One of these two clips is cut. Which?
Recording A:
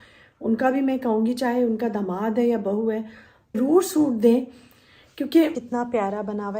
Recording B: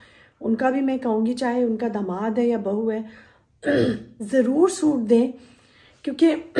A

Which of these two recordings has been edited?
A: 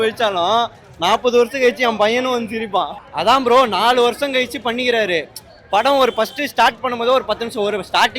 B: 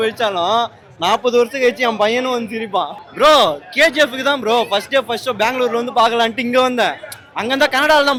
A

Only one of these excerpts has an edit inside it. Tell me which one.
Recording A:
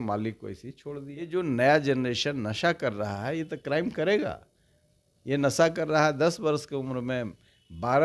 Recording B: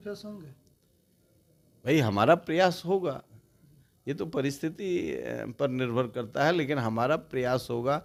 A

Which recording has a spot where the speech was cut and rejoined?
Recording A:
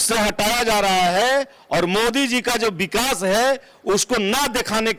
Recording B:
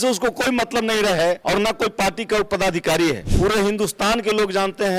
B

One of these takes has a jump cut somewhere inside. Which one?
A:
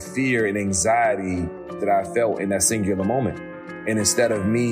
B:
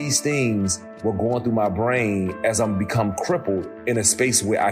A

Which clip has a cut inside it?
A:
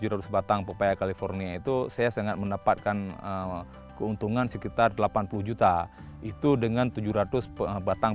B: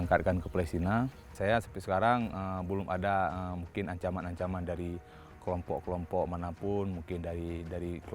B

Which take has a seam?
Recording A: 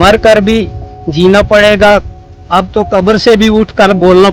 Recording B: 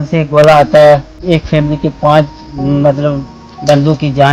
B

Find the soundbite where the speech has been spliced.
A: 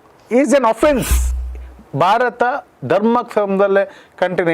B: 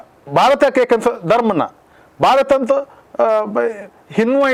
A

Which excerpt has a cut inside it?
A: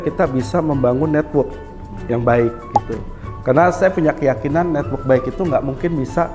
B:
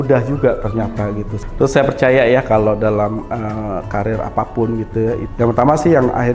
B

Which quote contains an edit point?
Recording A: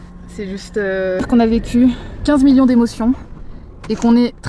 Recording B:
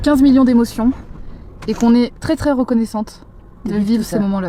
A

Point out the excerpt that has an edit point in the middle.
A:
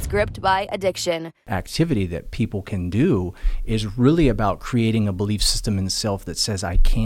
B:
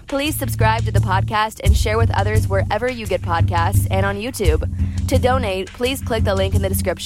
A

